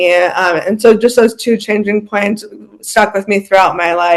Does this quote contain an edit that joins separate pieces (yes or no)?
no